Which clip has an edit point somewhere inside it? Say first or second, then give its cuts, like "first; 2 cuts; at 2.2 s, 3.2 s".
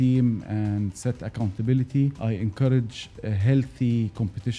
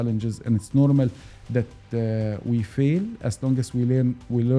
first; 1 cut; at 2.2 s